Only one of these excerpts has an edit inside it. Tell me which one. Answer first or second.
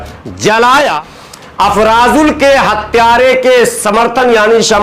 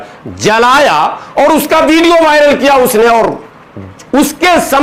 first